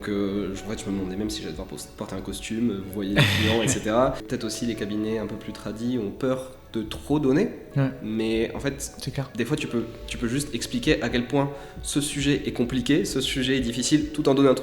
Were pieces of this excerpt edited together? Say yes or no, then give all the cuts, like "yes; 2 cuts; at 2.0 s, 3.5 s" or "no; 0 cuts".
yes; 1 cut; at 4.2 s